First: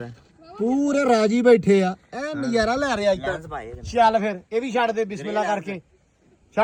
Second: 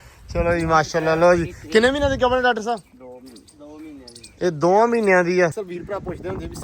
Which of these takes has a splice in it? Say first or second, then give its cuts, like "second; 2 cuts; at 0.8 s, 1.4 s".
second; 1 cut; at 5.6 s